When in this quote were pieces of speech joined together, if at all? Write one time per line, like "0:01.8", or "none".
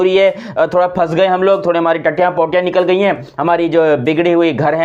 none